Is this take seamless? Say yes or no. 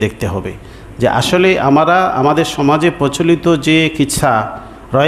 yes